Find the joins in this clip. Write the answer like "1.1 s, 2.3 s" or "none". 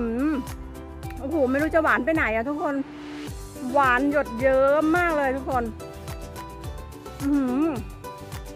5.7 s, 7.2 s